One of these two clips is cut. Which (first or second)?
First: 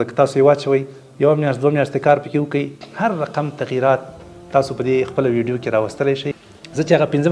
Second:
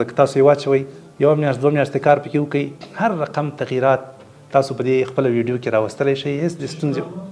first